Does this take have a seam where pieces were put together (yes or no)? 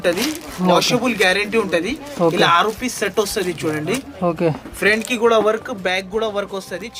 no